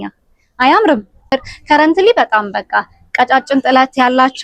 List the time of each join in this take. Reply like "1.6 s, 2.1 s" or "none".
1.5 s